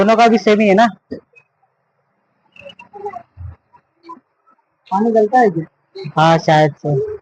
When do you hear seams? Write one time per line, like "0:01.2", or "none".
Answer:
none